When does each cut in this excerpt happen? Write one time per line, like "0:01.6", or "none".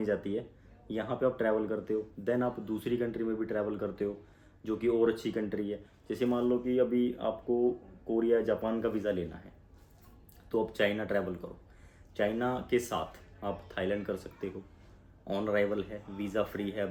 none